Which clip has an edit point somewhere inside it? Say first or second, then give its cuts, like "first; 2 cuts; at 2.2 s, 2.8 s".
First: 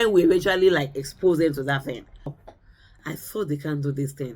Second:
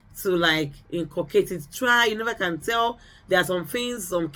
first; 1 cut; at 2.4 s